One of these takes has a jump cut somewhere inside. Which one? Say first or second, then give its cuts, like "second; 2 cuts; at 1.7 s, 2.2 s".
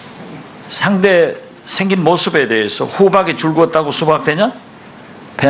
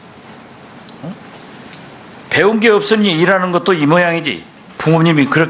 second; 1 cut; at 2.7 s